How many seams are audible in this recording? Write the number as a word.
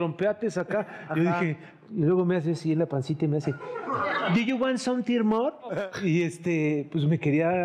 two